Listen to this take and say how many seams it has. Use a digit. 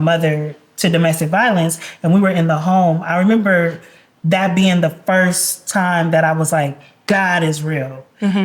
0